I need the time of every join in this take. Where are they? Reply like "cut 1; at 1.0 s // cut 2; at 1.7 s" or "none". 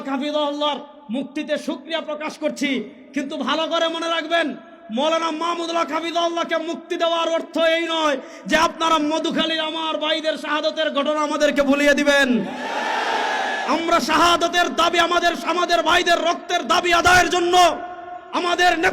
none